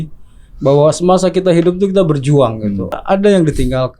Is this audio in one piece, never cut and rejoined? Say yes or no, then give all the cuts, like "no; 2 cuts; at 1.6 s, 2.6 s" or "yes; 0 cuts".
no; 1 cut; at 3.0 s